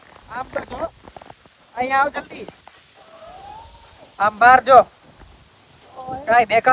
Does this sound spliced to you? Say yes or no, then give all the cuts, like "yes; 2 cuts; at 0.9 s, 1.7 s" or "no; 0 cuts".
no; 0 cuts